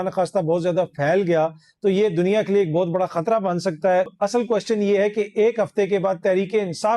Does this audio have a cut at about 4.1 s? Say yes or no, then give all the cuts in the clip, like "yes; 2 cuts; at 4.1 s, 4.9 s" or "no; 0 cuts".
yes; 1 cut; at 4.1 s